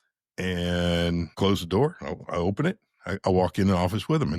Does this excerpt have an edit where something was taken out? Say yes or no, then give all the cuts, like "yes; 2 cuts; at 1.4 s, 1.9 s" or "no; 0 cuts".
yes; 1 cut; at 1.3 s